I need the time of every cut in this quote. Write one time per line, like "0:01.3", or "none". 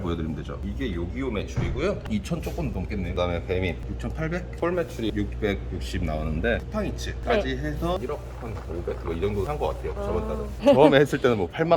0:03.1
0:04.5
0:06.6
0:10.5